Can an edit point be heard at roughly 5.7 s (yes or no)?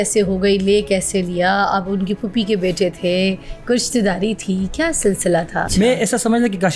yes